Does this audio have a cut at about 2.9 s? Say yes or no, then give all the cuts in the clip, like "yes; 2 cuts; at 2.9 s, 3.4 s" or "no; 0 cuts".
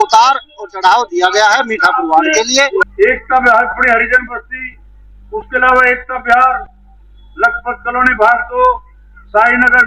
yes; 1 cut; at 2.9 s